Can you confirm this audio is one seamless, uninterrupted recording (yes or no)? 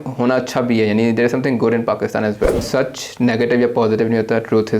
no